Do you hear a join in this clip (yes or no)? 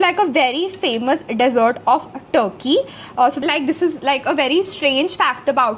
yes